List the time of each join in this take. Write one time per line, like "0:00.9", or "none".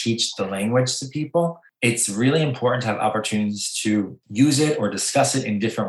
0:01.7
0:04.2

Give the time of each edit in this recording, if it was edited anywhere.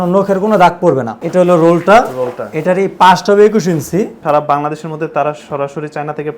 0:01.2
0:04.2

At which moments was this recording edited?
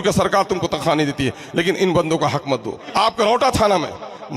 0:02.8

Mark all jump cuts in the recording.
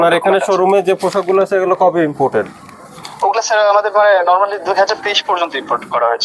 none

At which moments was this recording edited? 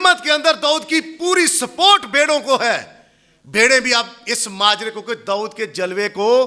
none

